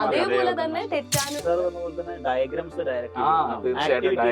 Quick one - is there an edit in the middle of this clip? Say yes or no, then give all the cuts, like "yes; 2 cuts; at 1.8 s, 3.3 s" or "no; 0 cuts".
yes; 1 cut; at 1.4 s